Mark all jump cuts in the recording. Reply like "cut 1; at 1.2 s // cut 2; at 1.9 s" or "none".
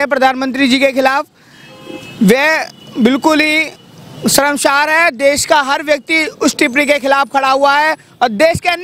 none